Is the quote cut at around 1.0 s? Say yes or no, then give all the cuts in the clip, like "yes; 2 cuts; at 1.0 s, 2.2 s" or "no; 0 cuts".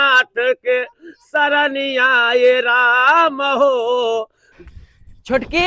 no; 1 cut; at 4.7 s